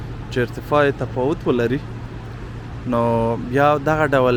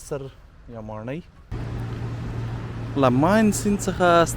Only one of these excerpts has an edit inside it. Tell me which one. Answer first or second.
second